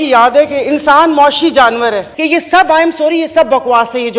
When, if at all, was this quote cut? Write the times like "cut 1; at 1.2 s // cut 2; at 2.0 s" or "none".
cut 1; at 2.1 s